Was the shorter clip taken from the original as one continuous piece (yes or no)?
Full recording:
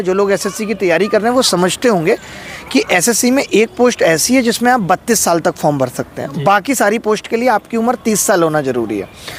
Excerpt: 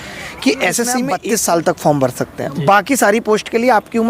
no